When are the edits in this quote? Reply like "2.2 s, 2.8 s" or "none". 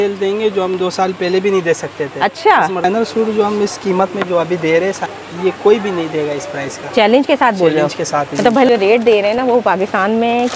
2.8 s, 5.1 s, 8.7 s